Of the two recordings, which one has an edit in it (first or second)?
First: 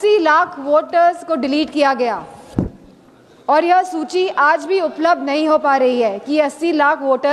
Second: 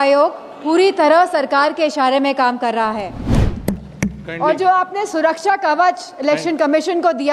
second